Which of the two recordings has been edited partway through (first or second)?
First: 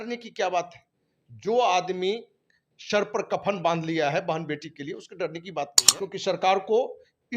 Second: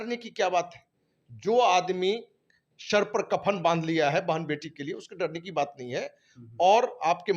first